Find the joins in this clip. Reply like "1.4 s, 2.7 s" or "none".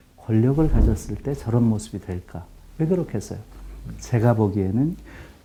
none

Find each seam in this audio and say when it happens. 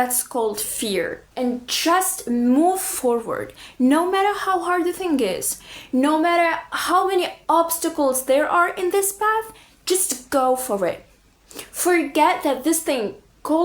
1.2 s

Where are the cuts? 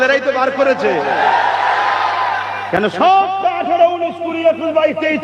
none

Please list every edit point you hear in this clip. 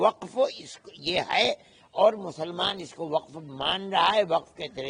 none

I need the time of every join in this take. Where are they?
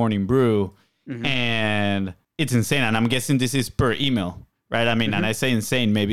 2.2 s

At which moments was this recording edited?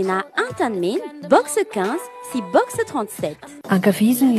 none

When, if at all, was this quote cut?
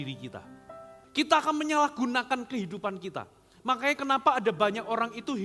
0.9 s

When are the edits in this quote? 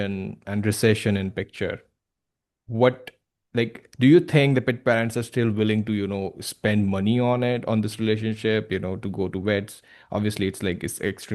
none

